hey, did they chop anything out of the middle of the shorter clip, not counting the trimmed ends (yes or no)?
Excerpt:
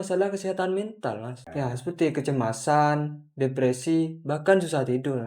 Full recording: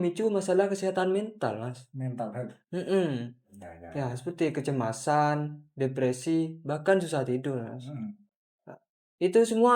yes